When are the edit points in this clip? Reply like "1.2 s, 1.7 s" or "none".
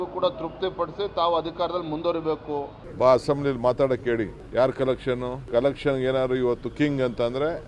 2.8 s, 4.4 s